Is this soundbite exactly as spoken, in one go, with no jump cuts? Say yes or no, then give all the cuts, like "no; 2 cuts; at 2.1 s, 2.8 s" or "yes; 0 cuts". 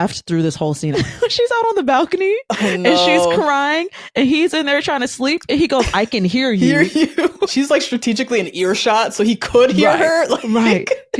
no; 2 cuts; at 0.9 s, 7.5 s